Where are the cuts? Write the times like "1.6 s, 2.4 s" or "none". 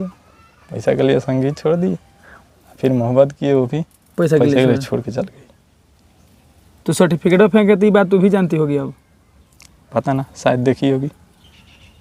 none